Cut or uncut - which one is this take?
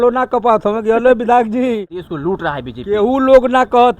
cut